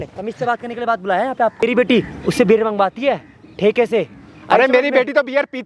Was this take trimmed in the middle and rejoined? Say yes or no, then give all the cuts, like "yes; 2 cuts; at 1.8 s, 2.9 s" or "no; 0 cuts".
yes; 1 cut; at 1.5 s